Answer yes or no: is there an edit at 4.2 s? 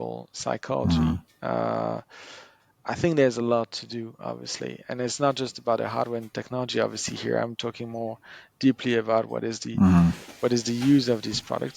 no